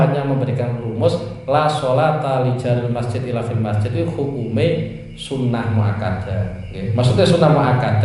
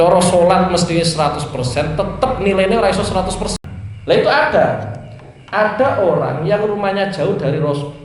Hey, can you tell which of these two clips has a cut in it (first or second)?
second